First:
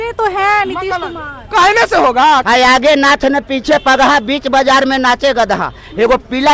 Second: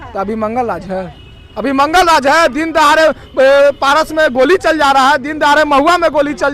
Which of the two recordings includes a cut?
first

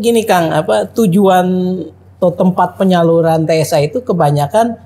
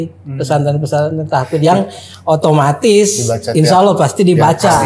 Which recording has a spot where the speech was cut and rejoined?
first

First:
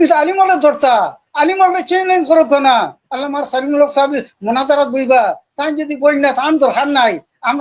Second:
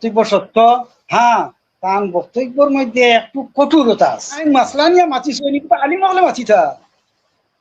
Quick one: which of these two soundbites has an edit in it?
second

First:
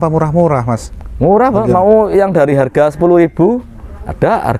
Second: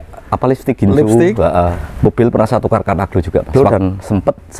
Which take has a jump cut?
second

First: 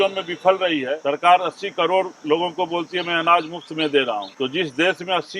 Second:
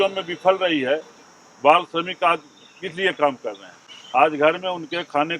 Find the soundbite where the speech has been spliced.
first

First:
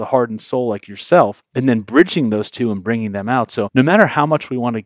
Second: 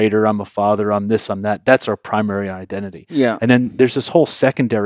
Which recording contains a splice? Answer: first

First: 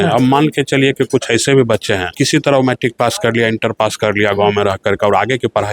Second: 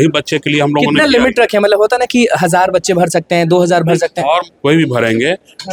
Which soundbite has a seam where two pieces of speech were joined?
first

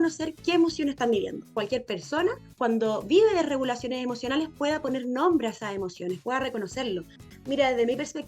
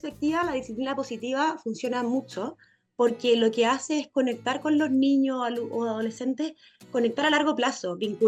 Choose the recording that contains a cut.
first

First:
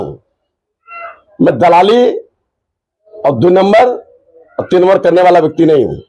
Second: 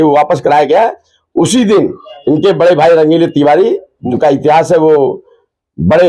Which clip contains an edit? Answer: second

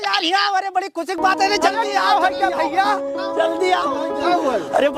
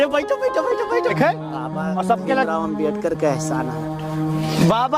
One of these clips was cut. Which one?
second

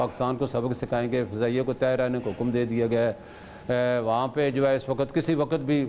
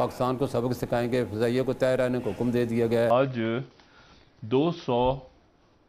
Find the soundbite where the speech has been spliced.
second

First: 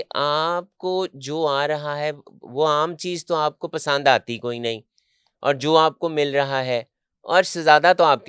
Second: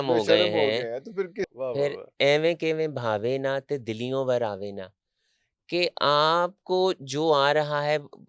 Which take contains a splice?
second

